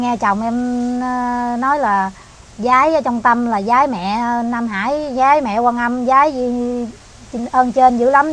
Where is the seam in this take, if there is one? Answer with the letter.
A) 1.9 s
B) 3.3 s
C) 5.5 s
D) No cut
D